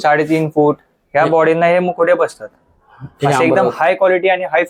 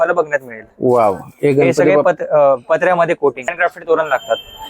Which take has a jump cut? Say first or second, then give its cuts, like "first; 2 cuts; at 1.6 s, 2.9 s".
second; 1 cut; at 3.5 s